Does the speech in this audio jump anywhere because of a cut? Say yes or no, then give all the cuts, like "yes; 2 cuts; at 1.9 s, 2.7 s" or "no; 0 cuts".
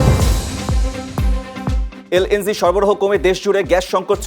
yes; 1 cut; at 2.0 s